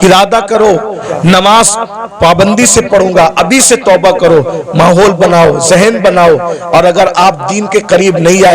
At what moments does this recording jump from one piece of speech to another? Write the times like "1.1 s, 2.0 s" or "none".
1.0 s

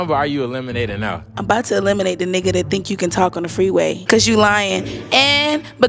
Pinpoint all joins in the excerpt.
1.3 s, 4.0 s

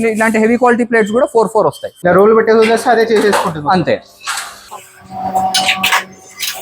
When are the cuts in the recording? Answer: 1.9 s

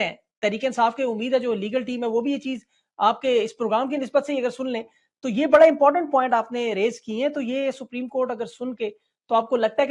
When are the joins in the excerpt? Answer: none

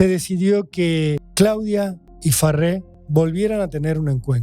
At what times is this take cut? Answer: 1.2 s, 2.1 s, 2.9 s

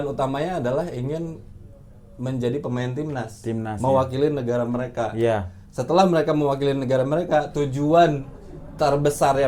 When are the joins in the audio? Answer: none

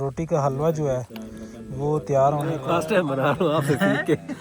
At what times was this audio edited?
2.6 s

